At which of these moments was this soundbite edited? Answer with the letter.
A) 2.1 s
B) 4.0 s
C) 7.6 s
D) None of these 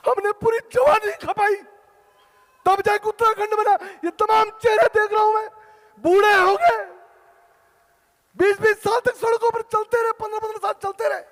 D